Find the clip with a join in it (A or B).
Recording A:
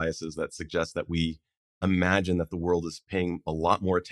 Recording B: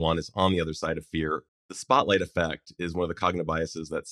B